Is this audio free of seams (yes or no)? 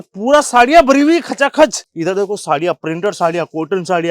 no